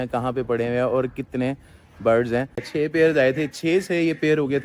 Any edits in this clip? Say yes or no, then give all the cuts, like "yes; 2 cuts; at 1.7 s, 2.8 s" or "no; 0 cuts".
yes; 1 cut; at 2.6 s